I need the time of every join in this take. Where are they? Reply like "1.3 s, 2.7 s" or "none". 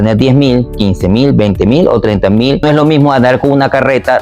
2.6 s